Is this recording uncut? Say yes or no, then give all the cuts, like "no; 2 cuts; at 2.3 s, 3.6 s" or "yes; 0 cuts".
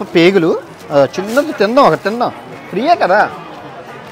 yes; 0 cuts